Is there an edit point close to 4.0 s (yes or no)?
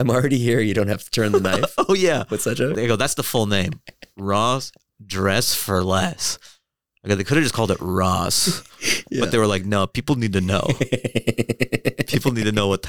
no